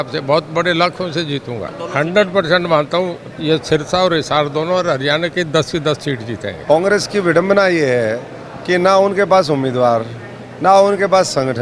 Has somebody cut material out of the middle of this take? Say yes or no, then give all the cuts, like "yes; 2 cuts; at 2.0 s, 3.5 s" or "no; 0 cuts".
yes; 2 cuts; at 1.8 s, 6.5 s